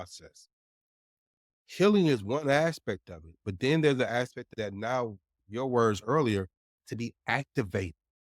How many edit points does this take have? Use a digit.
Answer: 2